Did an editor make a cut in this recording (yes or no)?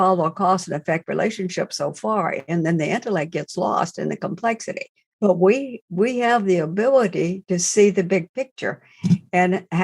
yes